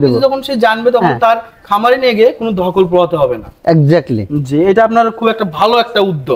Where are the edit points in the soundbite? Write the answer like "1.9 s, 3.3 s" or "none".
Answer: none